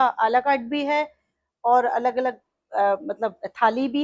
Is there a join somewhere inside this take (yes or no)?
no